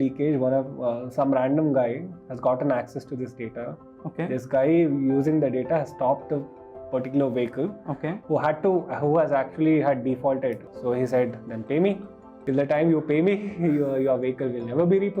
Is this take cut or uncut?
cut